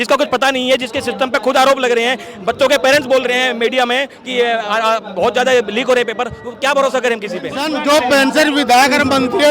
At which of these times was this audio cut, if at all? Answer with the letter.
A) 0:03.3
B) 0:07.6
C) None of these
B